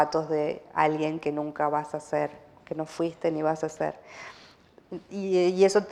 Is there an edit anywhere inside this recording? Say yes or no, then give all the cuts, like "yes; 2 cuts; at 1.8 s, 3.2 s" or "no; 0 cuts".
no; 0 cuts